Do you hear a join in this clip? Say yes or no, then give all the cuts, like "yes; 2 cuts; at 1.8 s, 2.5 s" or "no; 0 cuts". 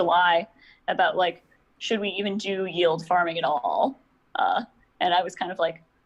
no; 0 cuts